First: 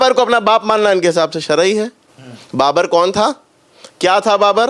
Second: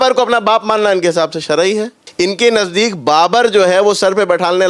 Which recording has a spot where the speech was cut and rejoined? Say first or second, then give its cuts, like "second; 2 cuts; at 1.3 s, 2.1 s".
second; 1 cut; at 2.0 s